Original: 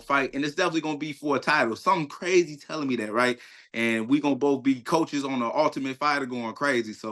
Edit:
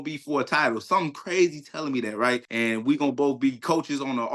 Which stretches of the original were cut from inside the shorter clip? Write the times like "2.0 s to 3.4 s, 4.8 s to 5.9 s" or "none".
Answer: 3.4 s to 3.7 s